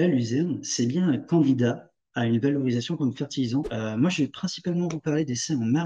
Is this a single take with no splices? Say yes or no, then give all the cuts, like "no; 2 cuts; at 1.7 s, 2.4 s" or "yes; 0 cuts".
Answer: no; 1 cut; at 3.7 s